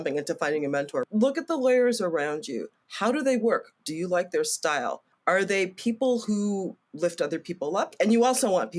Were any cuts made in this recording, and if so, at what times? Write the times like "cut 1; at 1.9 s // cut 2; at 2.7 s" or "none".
cut 1; at 1.0 s // cut 2; at 5.1 s // cut 3; at 7.9 s